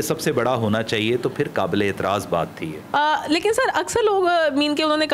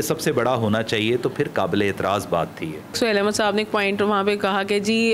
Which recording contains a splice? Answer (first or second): second